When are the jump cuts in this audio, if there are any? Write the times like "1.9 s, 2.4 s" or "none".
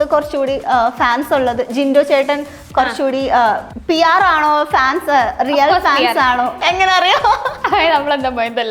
3.7 s, 6.6 s, 7.6 s